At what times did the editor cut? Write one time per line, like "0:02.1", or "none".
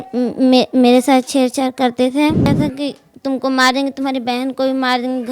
0:02.5